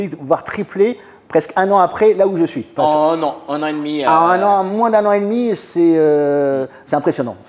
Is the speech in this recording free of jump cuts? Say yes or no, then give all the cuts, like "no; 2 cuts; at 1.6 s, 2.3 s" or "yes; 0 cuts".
no; 1 cut; at 2.7 s